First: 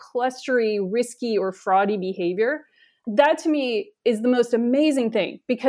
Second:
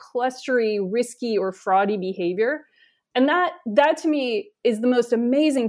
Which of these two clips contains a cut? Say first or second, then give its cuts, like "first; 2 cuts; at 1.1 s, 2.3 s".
first; 1 cut; at 3.0 s